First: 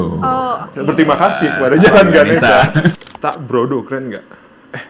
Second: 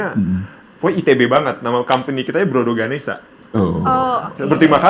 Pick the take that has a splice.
first; 1 cut; at 2.9 s

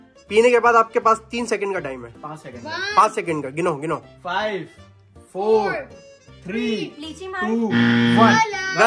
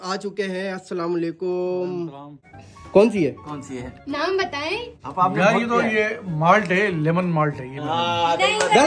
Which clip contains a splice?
second; 1 cut; at 2.3 s

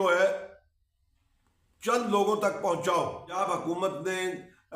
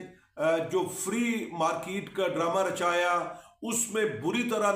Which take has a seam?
first; 1 cut; at 3.4 s

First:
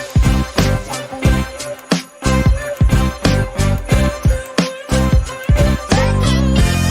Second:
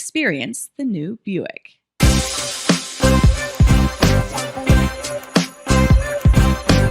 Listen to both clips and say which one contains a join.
second; 1 cut; at 1.8 s

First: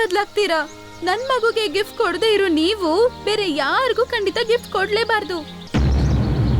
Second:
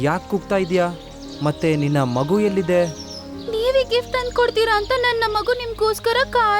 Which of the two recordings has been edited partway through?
first; 1 cut; at 5.6 s

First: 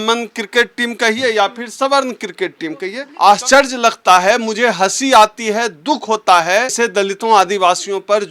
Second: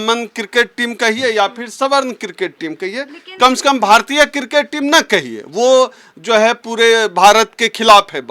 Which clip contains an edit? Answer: first; 2 cuts; at 3.0 s, 6.8 s

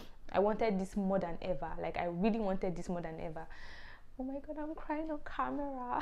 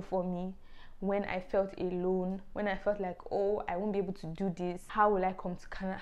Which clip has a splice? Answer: second; 1 cut; at 4.8 s

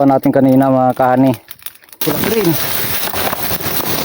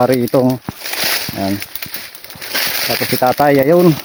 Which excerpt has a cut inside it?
first; 1 cut; at 2.0 s

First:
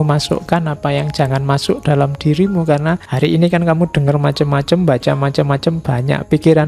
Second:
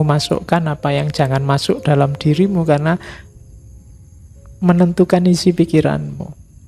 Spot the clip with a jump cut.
first; 1 cut; at 3.1 s

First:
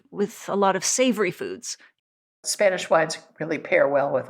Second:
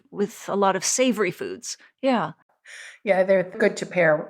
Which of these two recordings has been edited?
first; 1 cut; at 1.9 s

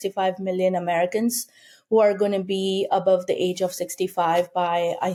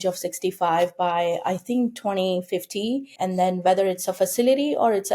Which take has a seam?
second; 1 cut; at 3.2 s

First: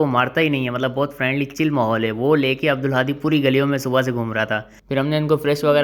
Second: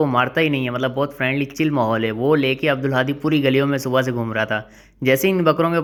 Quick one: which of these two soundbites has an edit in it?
first; 1 cut; at 4.7 s

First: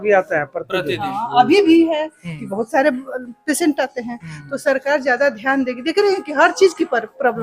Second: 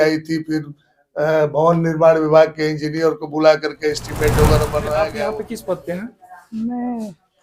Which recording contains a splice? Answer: second; 1 cut; at 5.3 s

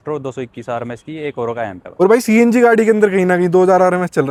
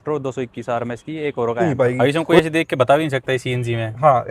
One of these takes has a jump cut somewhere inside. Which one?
second; 1 cut; at 1.7 s

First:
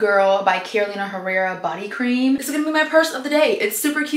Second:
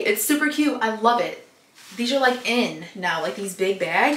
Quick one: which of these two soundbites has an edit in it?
first; 1 cut; at 2.4 s

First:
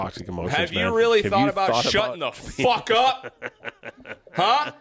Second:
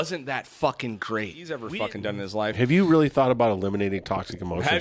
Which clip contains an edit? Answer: second; 1 cut; at 1.7 s

